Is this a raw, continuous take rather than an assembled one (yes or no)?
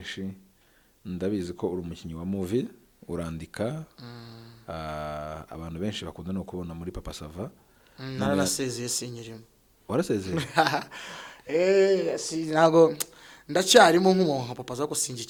yes